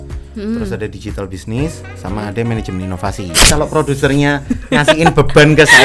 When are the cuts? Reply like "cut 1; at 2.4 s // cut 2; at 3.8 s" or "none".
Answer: cut 1; at 3.4 s